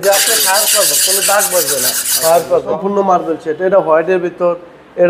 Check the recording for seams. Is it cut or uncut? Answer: cut